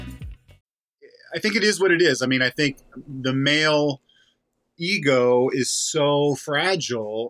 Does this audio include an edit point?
yes; 1 cut; at 0.9 s

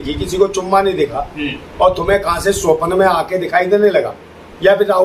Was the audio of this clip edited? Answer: no; 0 cuts

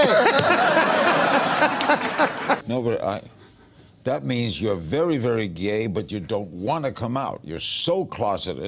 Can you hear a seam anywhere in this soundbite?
no; 0 cuts

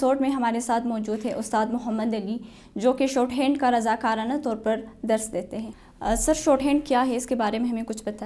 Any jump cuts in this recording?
yes; 1 cut; at 5.8 s

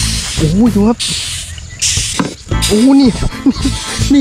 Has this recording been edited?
yes; 1 cut; at 2.1 s

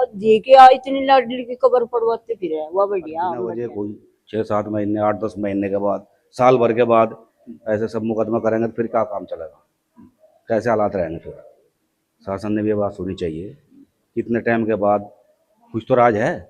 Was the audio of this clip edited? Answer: yes; 1 cut; at 3.6 s

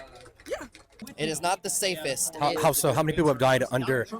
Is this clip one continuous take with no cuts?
no; 1 cut; at 1.0 s

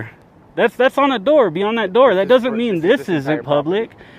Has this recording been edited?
no; 0 cuts

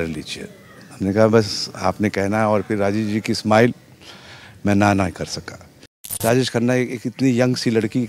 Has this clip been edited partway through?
yes; 1 cut; at 6.0 s

